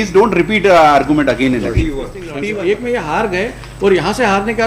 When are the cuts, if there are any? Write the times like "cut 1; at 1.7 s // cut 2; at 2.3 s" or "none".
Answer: cut 1; at 2.3 s